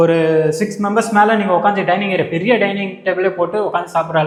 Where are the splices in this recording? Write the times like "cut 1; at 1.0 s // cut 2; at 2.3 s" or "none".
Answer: none